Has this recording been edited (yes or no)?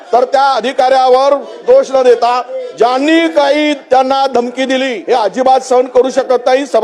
yes